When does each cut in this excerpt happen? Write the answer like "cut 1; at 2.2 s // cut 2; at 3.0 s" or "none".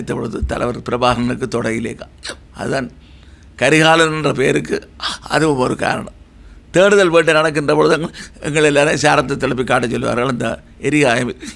none